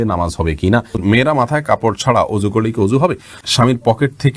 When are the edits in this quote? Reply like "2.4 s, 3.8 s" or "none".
1.0 s, 3.4 s